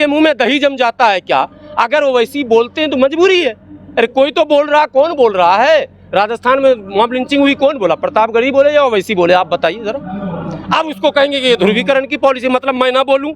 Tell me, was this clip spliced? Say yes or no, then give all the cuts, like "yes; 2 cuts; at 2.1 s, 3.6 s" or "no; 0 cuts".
no; 0 cuts